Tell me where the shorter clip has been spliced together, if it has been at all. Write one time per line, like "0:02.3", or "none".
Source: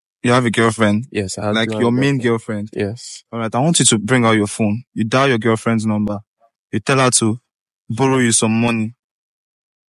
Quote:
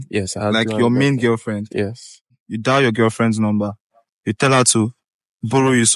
0:02.4